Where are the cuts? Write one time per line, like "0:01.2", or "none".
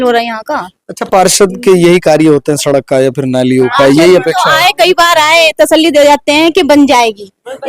none